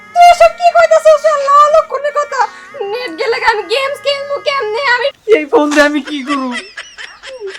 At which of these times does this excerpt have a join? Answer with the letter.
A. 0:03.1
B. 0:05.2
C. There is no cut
B